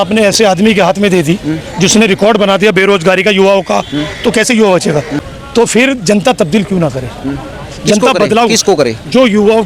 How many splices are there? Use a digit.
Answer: 1